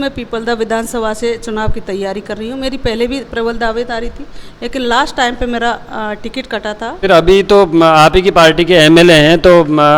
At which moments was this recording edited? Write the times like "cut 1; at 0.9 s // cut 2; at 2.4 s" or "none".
cut 1; at 7.0 s